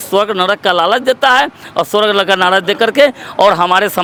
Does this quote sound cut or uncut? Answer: uncut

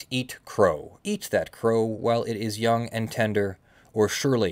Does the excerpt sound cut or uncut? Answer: cut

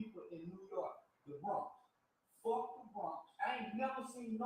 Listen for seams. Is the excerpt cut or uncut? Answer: cut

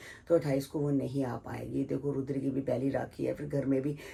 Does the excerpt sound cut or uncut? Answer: uncut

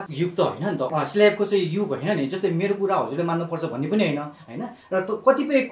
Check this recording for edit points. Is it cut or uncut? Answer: uncut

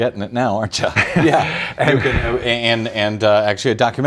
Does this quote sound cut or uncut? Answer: uncut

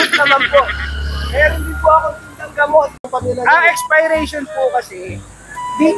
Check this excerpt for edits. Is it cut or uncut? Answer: cut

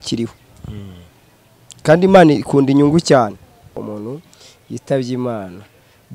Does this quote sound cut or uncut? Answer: cut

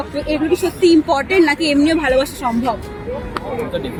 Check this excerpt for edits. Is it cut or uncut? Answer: uncut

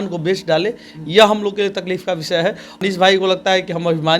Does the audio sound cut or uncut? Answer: cut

